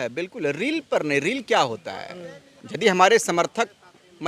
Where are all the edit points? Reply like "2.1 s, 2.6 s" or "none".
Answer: none